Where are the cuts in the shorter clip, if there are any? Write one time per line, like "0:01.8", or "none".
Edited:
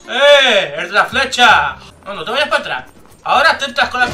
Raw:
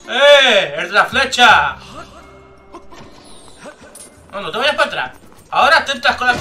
0:01.9